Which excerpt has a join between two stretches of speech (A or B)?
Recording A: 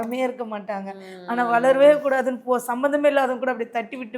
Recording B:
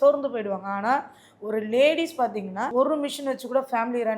B